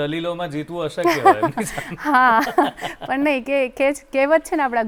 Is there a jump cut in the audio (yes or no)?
no